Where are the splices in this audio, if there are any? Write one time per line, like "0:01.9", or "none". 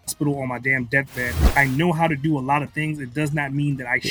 0:01.5

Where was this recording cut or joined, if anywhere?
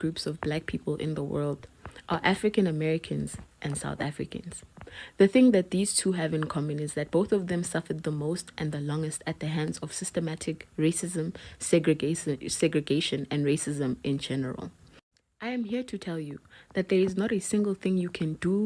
none

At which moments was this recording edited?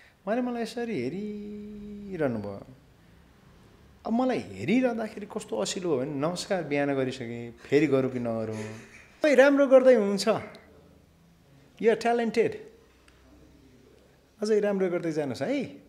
0:09.2

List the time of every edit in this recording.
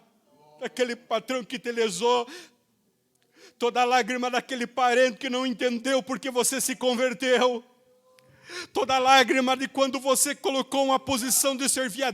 none

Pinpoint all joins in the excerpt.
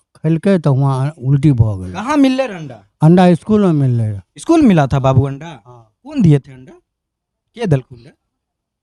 none

